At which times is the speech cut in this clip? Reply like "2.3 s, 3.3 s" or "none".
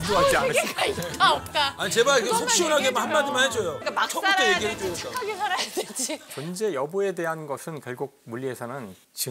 3.8 s, 6.3 s